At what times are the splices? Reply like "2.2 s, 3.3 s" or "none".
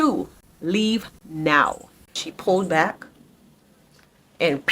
2.2 s